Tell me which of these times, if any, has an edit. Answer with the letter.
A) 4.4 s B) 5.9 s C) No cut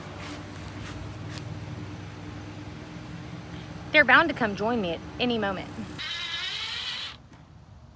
B